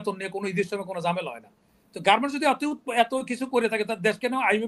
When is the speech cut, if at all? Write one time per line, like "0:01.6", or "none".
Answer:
none

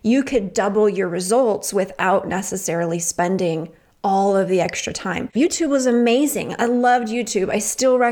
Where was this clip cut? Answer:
0:05.3

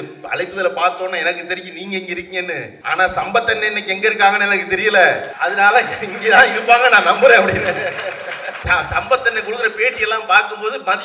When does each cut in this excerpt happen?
0:02.7
0:05.3
0:08.5

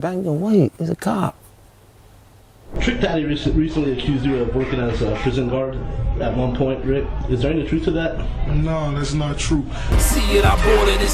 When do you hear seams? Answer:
0:02.8
0:09.9

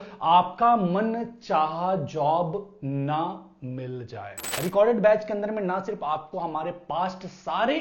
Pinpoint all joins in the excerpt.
0:04.5

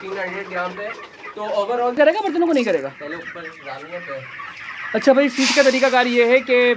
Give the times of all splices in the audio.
0:01.9

